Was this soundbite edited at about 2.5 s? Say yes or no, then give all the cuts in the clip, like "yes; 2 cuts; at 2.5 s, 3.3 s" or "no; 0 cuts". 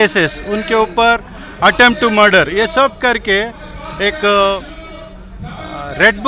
no; 0 cuts